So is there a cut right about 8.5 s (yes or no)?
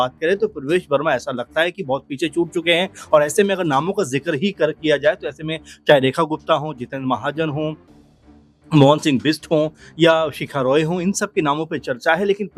no